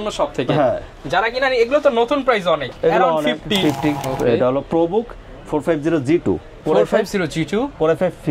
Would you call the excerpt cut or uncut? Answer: cut